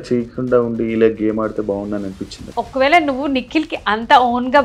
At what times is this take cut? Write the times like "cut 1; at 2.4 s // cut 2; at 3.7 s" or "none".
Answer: cut 1; at 2.5 s